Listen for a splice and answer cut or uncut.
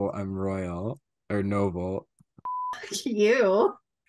uncut